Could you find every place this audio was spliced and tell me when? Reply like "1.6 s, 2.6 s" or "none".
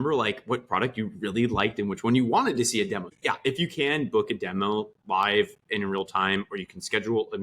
3.1 s